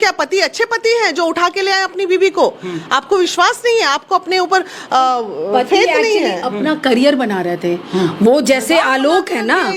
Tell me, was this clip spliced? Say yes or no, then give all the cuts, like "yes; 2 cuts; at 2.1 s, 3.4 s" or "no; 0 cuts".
no; 0 cuts